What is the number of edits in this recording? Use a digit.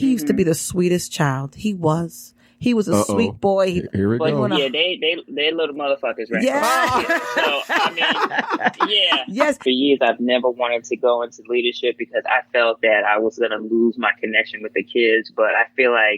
1